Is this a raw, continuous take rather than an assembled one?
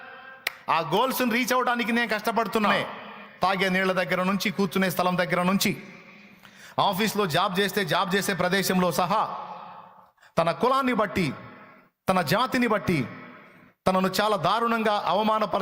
no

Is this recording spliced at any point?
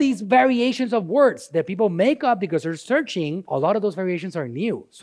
yes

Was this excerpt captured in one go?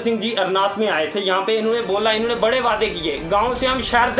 yes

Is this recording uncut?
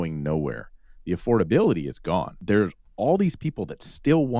no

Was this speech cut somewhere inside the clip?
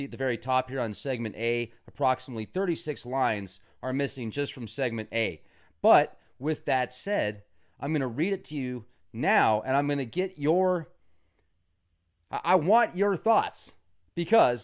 yes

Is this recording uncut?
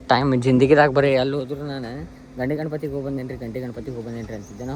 yes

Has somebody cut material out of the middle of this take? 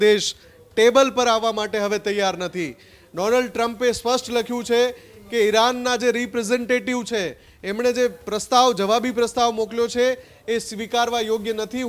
no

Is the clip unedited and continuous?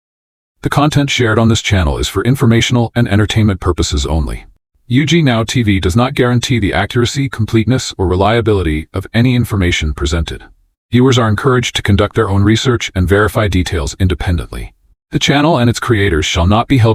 yes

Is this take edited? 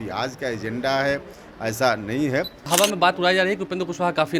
yes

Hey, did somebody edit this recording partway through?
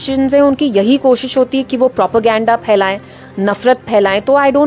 no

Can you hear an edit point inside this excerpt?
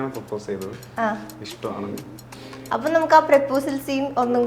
yes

